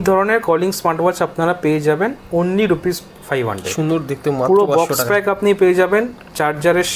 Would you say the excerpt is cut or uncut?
uncut